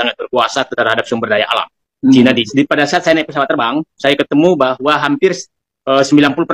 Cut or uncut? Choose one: cut